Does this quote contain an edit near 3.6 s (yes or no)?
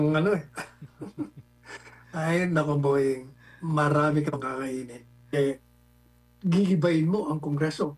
no